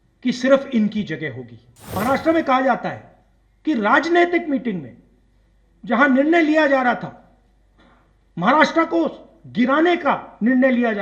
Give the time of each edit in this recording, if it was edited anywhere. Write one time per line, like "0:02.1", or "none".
0:01.8